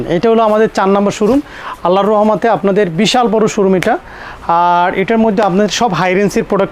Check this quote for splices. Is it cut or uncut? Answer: uncut